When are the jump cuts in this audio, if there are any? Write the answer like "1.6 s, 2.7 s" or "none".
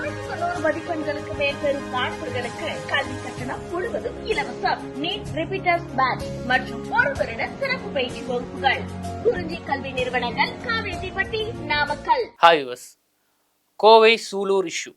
12.3 s